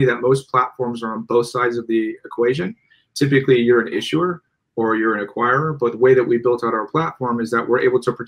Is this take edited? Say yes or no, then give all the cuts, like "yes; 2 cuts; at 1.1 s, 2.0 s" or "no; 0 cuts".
no; 0 cuts